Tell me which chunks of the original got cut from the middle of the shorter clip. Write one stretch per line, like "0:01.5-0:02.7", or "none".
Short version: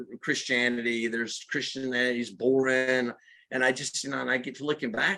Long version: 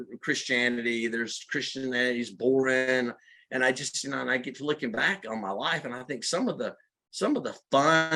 none